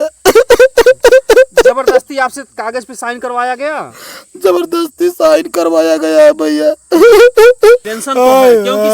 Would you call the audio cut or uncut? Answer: cut